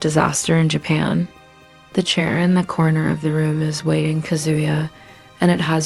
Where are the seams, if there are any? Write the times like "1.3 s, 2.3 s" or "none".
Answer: none